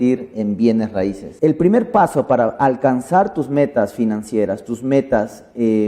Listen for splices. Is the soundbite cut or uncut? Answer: cut